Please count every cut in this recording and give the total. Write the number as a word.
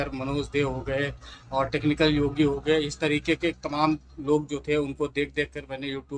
zero